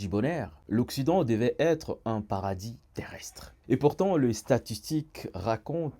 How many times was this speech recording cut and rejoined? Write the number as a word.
zero